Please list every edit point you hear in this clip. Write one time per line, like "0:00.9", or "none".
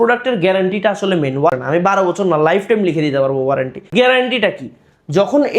0:01.5
0:03.9